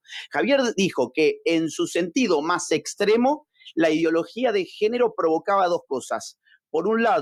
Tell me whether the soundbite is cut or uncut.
uncut